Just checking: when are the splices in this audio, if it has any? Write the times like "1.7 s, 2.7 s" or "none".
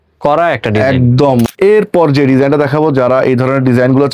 1.5 s